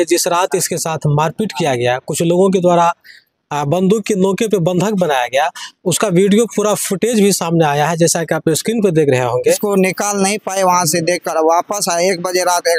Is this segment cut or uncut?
cut